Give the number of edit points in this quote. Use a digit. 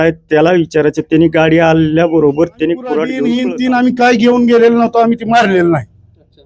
1